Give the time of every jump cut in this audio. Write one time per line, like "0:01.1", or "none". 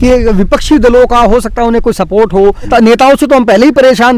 0:02.7